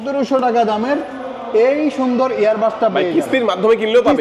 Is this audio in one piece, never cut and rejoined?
yes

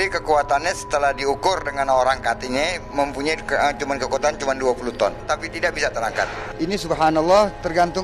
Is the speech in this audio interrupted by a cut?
yes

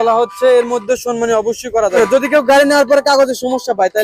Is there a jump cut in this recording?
yes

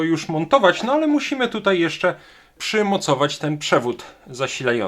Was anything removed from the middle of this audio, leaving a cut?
yes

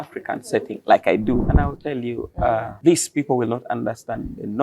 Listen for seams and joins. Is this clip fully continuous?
no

